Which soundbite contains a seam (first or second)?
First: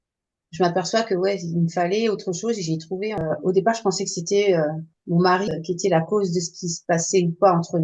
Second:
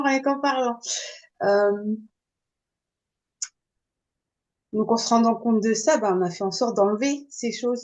first